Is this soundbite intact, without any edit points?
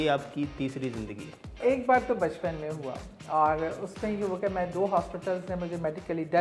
no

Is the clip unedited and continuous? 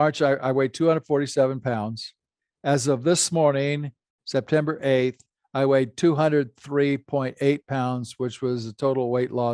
yes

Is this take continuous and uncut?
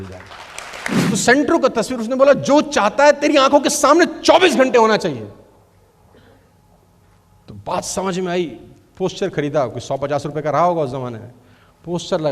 no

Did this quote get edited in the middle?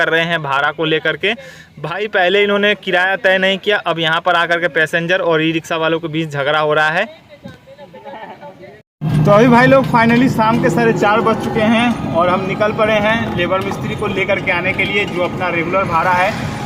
no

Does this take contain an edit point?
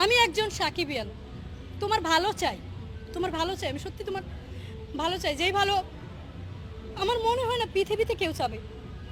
no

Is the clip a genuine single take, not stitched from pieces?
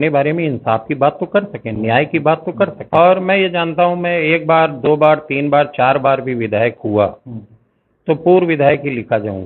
no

